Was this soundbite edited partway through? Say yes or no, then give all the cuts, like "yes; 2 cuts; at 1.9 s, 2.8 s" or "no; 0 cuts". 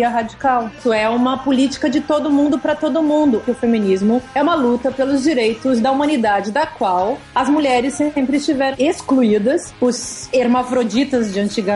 yes; 6 cuts; at 0.8 s, 3.4 s, 4.3 s, 7.2 s, 8.7 s, 9.9 s